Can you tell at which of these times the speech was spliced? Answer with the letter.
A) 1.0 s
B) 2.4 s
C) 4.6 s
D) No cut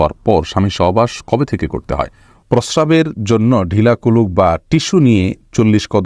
B